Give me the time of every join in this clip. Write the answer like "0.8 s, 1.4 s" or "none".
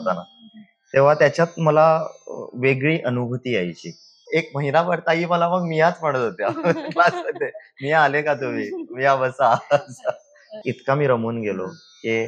4.2 s, 10.5 s